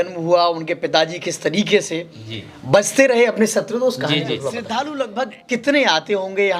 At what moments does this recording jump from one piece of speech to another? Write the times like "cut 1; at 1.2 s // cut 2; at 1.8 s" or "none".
cut 1; at 4.6 s